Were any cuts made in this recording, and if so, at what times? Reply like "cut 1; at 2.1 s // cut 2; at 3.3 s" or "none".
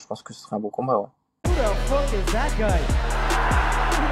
cut 1; at 1.2 s